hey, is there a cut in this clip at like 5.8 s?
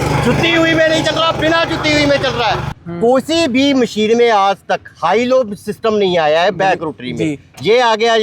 no; 1 cut; at 2.7 s

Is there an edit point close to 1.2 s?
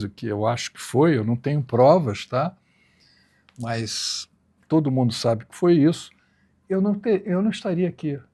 no; 0 cuts

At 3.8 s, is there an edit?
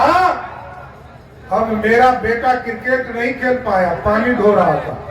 no; 0 cuts

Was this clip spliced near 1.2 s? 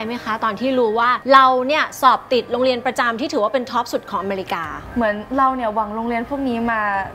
yes; 2 cuts; at 1.2 s, 4.8 s

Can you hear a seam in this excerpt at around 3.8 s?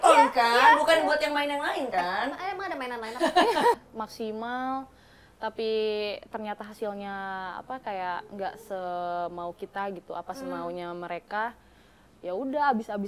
yes; 1 cut; at 3.8 s

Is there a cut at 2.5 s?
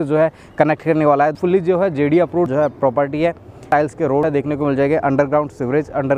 yes; 3 cuts; at 1.4 s, 2.5 s, 4.0 s

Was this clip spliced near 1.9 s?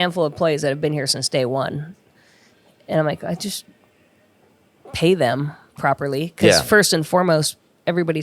no; 0 cuts

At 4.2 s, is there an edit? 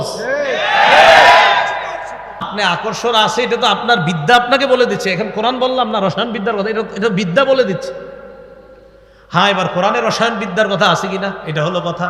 no; 1 cut; at 2.8 s

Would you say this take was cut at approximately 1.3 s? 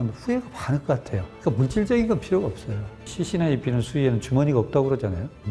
yes; 2 cuts; at 1.3 s, 3.1 s

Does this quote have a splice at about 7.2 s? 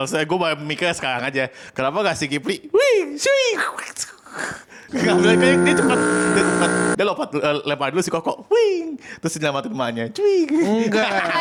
no; 0 cuts

